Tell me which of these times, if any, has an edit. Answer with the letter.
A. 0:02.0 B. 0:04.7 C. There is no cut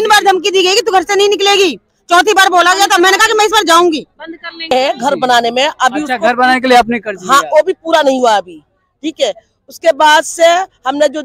B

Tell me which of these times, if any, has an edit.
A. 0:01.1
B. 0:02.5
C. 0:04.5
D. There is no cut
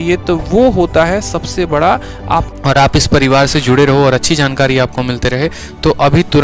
B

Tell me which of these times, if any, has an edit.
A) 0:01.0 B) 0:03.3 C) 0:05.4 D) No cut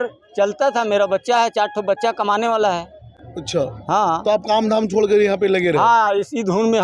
D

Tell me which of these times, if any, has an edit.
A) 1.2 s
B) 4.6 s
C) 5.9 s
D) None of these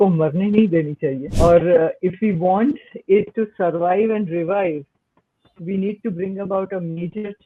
A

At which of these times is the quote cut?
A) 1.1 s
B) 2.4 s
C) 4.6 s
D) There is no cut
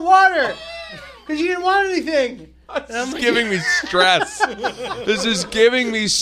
D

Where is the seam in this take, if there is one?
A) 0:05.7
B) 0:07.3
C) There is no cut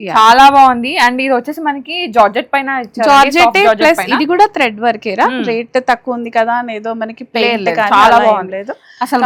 C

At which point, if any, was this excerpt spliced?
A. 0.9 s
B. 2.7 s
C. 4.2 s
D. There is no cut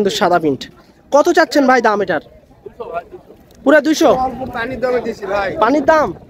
C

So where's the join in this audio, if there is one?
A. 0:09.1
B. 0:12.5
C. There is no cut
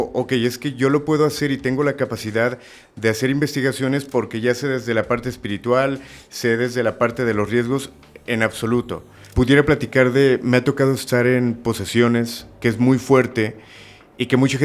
A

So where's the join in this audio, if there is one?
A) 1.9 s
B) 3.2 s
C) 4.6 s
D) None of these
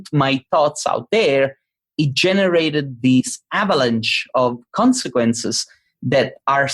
D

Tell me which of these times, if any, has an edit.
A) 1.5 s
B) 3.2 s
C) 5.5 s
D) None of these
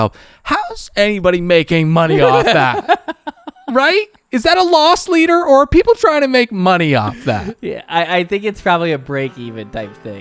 D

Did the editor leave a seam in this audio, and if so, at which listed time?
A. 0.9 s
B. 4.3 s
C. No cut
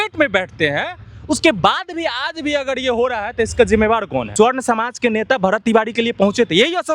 B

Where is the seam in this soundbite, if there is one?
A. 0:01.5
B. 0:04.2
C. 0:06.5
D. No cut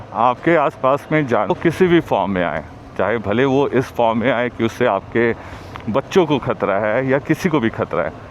A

